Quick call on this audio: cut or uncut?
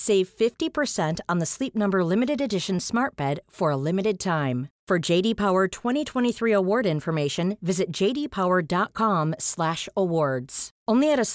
uncut